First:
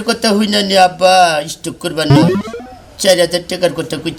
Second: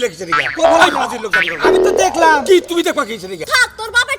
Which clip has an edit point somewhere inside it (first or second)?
second